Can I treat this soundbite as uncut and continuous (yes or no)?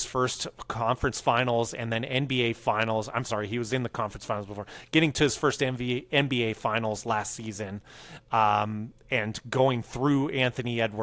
yes